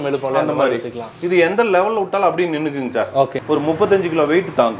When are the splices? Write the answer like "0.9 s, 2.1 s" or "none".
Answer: 3.4 s